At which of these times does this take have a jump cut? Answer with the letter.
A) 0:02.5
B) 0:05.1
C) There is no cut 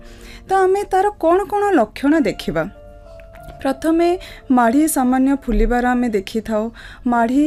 C